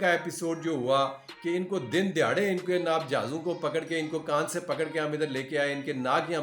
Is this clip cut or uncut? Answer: uncut